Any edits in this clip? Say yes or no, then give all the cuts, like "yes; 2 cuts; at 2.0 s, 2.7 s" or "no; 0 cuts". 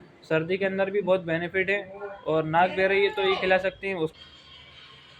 yes; 1 cut; at 4.2 s